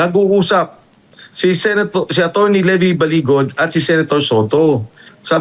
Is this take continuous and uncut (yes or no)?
yes